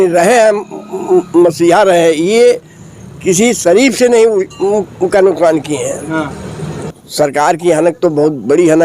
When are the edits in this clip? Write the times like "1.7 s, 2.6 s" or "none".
6.7 s